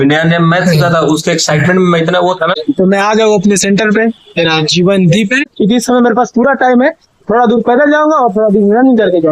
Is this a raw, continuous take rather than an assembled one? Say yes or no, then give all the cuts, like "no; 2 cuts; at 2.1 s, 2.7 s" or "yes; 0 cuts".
no; 2 cuts; at 2.5 s, 5.5 s